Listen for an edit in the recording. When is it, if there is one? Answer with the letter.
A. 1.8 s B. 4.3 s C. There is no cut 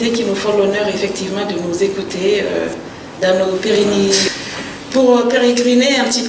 B